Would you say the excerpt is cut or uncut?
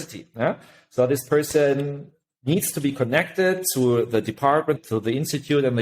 cut